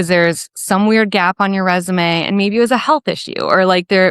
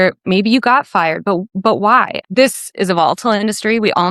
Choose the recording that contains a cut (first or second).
second